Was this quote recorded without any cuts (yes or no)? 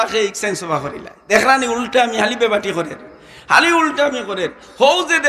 yes